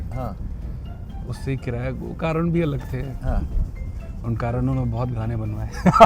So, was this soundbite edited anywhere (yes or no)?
no